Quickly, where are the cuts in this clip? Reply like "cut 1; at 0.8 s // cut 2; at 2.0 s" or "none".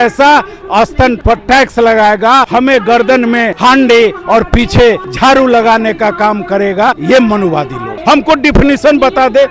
cut 1; at 1.2 s // cut 2; at 2.5 s // cut 3; at 3.5 s // cut 4; at 5.1 s // cut 5; at 7.0 s // cut 6; at 7.9 s